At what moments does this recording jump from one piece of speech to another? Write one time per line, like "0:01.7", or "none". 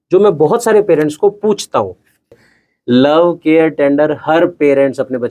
0:02.5